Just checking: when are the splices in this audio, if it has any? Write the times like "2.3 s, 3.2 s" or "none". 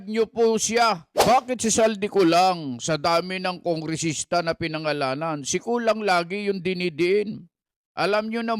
1.1 s